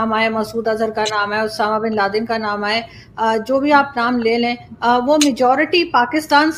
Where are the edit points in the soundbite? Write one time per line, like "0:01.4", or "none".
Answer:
none